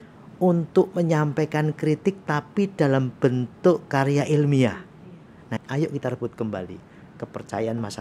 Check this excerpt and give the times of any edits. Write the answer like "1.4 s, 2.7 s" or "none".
5.5 s